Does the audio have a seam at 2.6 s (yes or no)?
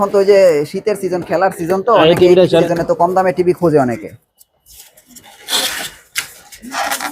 yes